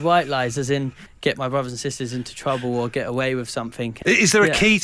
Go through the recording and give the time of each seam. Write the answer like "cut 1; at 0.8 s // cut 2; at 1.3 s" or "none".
cut 1; at 1.0 s // cut 2; at 4.0 s